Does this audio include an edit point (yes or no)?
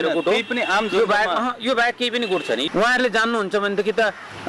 yes